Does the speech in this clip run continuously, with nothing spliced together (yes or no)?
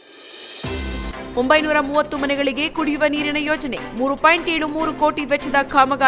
yes